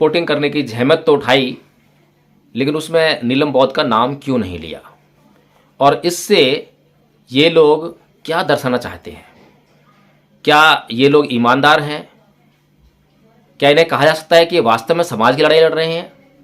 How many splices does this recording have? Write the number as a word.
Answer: zero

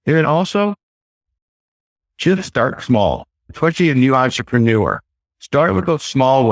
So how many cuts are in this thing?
one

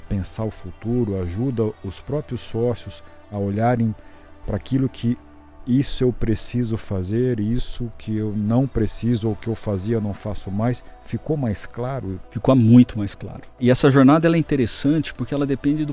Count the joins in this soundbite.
two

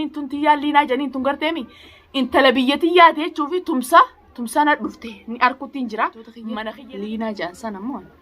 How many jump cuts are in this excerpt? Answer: one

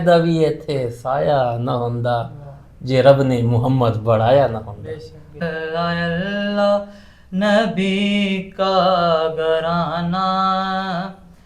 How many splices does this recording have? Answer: one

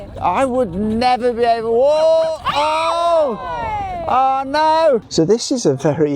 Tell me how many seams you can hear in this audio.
one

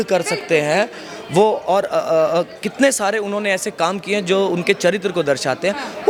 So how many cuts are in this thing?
zero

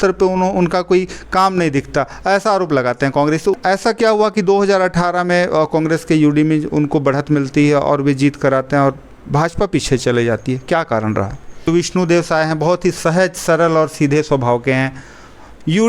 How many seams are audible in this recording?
two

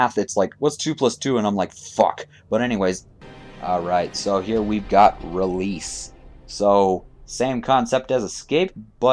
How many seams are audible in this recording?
one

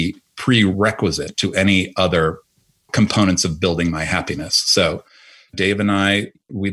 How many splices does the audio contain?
two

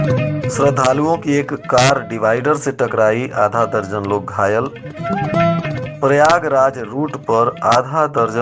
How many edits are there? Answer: zero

